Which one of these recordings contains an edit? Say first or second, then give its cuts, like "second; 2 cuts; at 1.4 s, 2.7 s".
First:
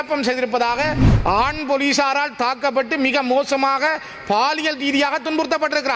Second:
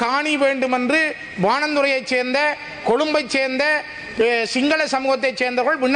first; 1 cut; at 1.1 s